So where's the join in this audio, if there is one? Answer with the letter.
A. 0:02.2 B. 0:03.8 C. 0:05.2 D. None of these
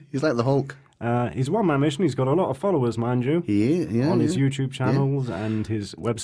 B